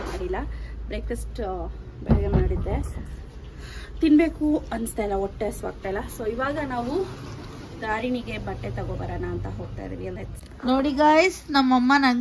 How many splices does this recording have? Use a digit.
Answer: 1